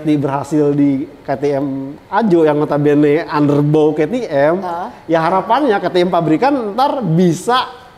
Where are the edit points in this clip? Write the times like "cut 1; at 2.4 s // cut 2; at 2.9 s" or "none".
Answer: none